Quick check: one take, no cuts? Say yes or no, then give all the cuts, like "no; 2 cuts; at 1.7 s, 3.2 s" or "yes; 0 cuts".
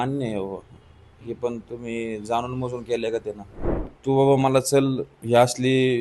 no; 1 cut; at 3.9 s